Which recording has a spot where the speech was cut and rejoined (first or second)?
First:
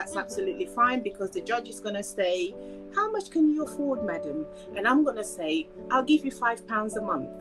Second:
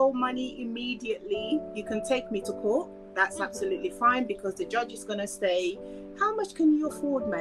second